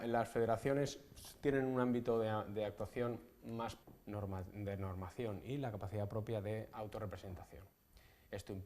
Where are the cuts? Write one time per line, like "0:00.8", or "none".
none